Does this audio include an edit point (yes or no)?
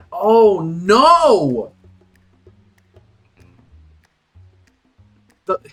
no